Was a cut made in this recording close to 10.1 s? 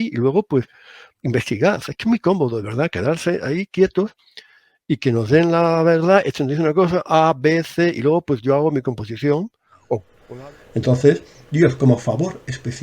yes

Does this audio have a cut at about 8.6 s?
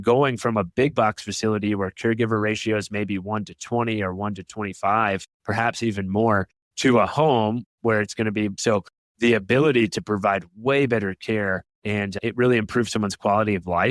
yes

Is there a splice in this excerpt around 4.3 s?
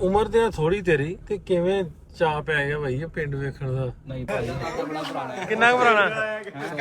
yes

